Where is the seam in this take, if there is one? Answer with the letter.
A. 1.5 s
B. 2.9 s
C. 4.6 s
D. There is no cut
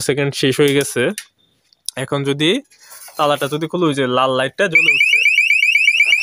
D